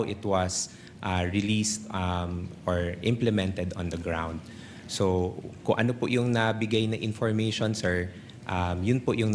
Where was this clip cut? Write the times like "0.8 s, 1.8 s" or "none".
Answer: none